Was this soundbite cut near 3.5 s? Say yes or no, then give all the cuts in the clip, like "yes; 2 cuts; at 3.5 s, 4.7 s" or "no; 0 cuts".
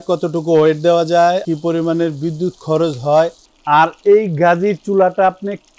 yes; 2 cuts; at 1.4 s, 3.5 s